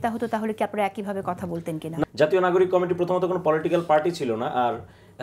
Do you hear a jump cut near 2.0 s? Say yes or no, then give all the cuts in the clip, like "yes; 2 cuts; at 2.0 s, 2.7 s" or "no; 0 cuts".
yes; 1 cut; at 2.0 s